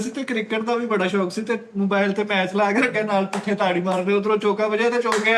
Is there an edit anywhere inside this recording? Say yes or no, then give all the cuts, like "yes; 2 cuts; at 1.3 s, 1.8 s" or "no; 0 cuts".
no; 0 cuts